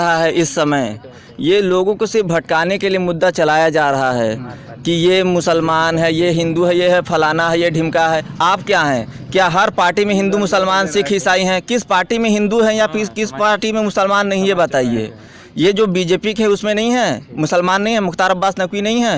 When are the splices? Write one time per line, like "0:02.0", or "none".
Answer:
none